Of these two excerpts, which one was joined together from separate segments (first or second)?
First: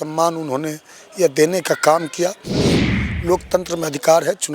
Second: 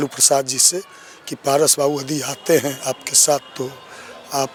first